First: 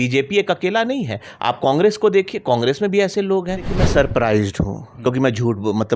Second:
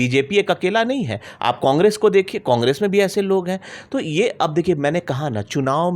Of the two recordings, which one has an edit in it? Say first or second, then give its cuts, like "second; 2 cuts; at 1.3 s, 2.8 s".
first; 1 cut; at 3.7 s